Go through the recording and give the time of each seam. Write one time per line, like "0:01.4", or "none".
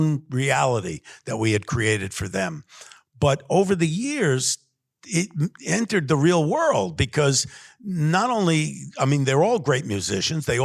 none